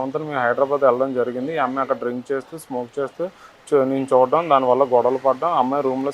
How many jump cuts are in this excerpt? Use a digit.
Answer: 0